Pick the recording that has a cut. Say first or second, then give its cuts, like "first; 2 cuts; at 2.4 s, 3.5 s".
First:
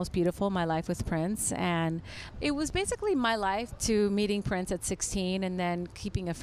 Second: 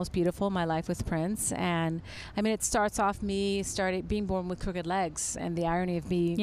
first; 2 cuts; at 2.2 s, 3.7 s